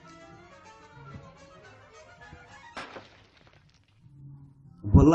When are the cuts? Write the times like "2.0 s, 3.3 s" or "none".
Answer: none